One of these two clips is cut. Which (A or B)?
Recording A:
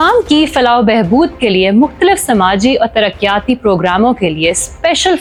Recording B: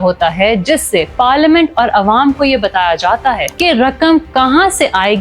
B